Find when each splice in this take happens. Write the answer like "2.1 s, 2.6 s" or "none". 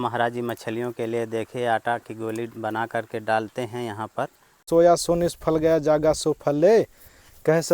4.6 s

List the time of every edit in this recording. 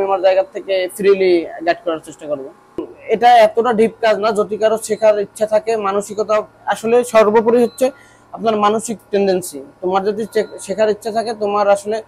2.9 s

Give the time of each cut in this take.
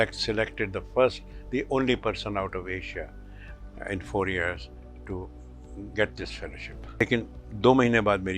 7.0 s

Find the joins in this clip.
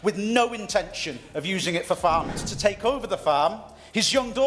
2.3 s

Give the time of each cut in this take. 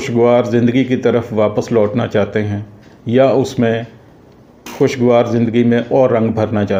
none

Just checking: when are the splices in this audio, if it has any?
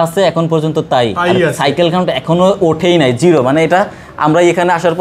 none

